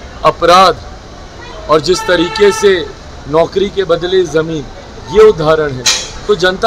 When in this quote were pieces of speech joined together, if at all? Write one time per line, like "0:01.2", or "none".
none